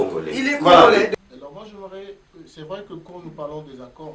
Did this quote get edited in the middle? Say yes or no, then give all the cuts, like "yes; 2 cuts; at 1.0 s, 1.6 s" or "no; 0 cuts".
yes; 1 cut; at 1.1 s